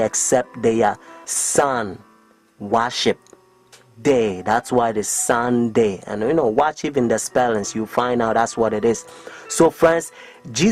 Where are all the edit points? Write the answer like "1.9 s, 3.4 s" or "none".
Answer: none

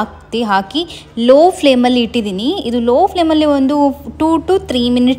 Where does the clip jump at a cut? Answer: none

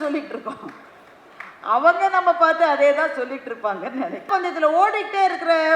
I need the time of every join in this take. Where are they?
4.2 s

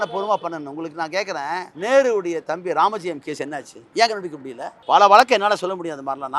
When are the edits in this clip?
1.7 s, 4.0 s, 4.9 s

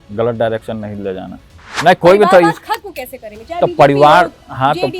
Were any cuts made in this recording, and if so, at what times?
1.7 s

